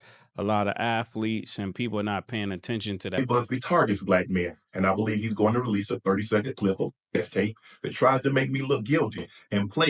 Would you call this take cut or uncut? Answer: cut